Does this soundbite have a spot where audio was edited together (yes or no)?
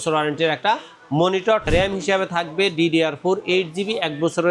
yes